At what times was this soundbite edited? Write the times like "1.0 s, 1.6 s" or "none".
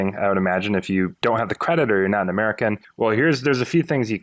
1.1 s, 2.9 s